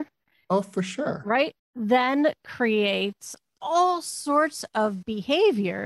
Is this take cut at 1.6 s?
yes; 1 cut; at 1.6 s

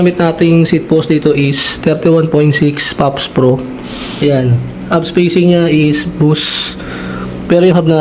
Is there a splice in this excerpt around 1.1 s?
no; 1 cut; at 4.0 s

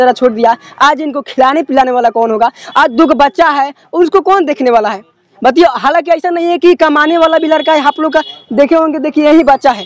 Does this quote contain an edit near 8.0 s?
no; 0 cuts

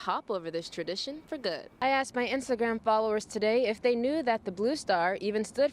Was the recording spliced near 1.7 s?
yes; 1 cut; at 1.7 s

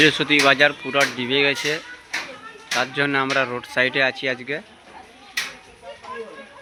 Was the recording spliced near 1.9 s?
no; 0 cuts

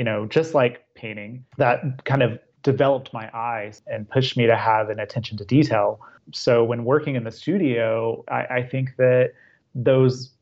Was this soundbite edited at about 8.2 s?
no; 1 cut; at 3.8 s

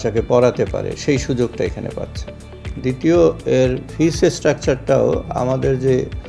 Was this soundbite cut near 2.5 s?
no; 0 cuts

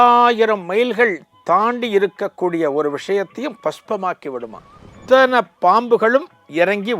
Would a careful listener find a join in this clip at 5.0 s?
yes; 1 cut; at 5.0 s

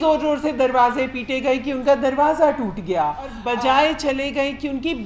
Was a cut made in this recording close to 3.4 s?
yes; 1 cut; at 3.4 s

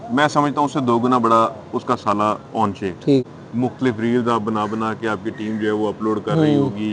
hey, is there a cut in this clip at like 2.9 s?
yes; 1 cut; at 2.9 s

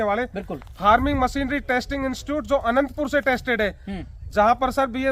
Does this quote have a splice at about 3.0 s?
no; 0 cuts

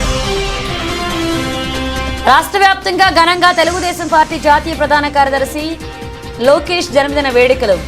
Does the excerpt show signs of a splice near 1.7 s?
yes; 1 cut; at 1.7 s

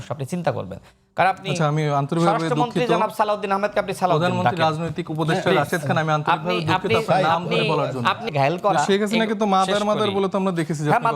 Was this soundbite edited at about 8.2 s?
yes; 1 cut; at 8.2 s

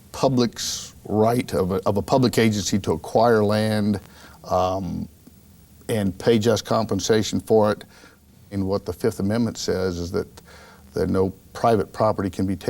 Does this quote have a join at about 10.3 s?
no; 1 cut; at 8.5 s

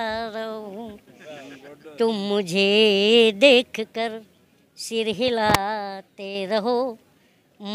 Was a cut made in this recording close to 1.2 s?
no; 0 cuts

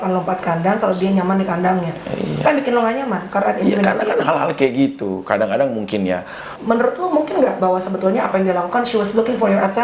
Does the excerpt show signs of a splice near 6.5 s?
yes; 1 cut; at 6.5 s

